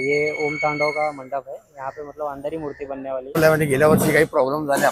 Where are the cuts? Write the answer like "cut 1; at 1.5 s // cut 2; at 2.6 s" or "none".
cut 1; at 3.4 s